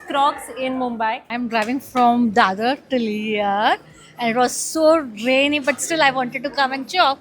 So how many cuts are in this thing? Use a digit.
1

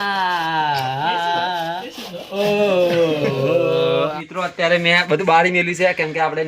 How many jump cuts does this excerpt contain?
1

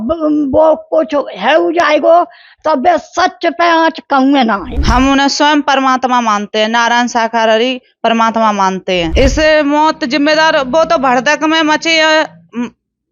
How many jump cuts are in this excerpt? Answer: 2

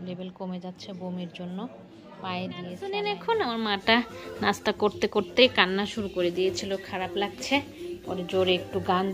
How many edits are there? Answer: 1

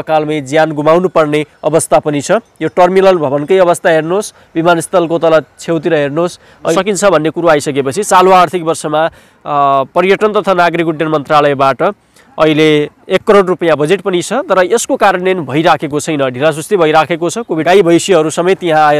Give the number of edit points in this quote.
2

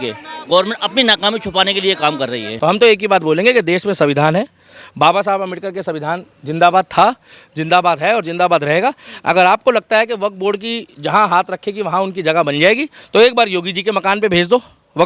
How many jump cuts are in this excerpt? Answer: 1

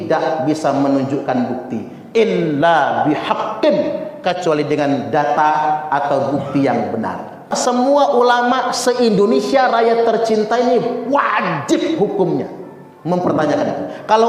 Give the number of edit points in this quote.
1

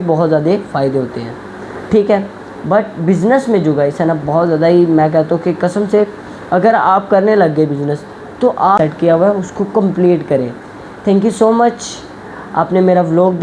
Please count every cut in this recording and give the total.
1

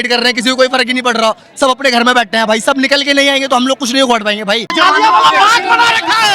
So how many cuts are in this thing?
1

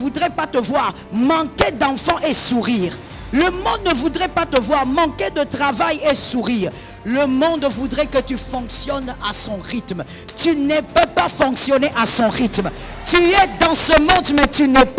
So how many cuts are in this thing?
0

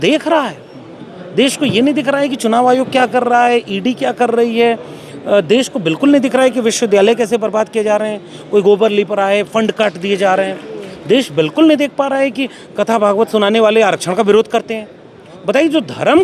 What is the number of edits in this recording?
0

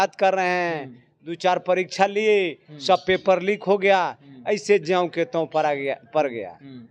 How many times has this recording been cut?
0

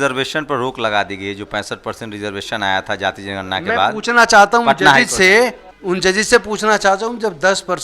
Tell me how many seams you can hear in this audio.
1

